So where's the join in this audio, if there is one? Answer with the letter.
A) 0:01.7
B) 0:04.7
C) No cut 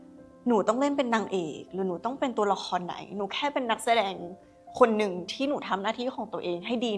C